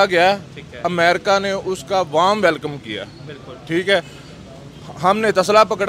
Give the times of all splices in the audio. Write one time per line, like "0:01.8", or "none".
none